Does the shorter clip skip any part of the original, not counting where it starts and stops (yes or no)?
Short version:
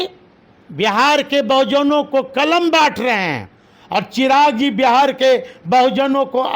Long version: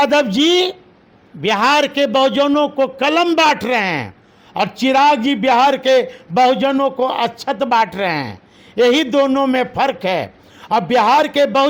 no